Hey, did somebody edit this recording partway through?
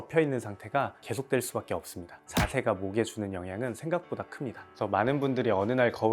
yes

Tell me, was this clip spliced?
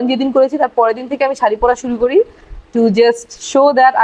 no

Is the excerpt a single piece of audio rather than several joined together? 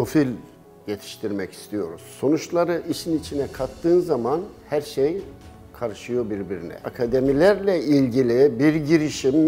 no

